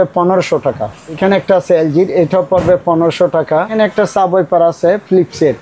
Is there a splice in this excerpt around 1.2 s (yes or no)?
yes